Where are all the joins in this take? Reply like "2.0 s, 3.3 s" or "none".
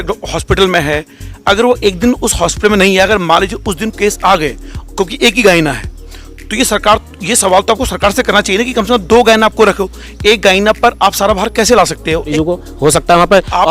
12.3 s